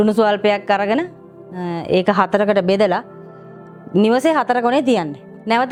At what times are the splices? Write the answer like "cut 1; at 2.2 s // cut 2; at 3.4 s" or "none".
none